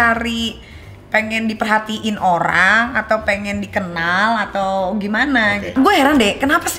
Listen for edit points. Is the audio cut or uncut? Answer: cut